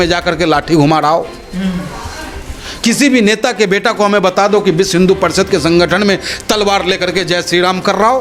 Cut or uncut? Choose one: uncut